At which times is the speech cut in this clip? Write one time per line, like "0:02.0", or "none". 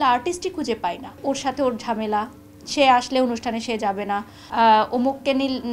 0:01.2
0:04.4

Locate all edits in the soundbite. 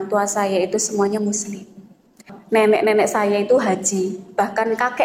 0:02.3

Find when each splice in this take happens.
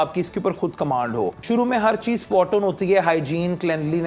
0:01.4

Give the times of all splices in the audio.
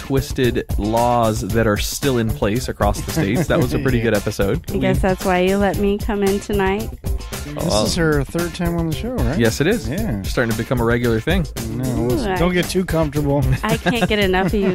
none

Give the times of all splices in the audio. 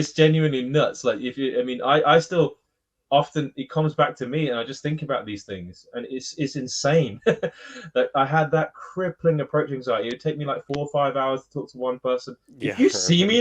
none

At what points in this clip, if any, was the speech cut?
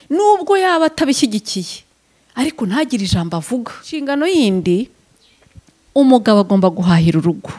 0:04.0

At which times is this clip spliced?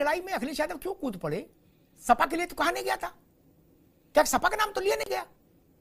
none

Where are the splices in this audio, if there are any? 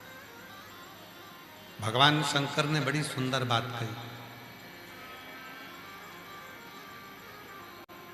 none

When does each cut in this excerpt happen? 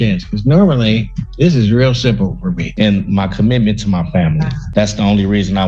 0:02.7

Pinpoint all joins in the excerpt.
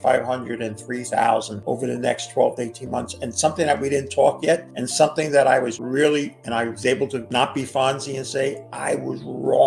0:01.5
0:04.8
0:05.8
0:07.2
0:08.7

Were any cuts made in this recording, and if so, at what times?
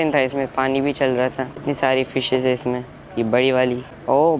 none

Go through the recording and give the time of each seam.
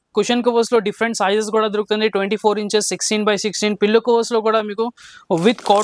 none

